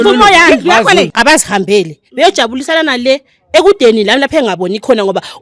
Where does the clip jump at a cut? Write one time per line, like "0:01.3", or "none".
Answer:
0:01.1